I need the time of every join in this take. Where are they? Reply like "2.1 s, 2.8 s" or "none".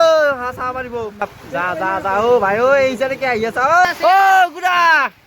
1.3 s, 3.8 s